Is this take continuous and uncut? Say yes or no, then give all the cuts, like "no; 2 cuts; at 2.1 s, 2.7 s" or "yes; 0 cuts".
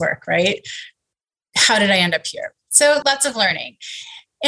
no; 1 cut; at 3.0 s